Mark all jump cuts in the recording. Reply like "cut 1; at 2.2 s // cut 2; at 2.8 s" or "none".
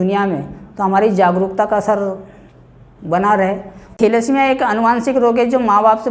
cut 1; at 3.9 s